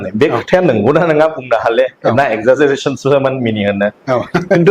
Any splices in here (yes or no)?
yes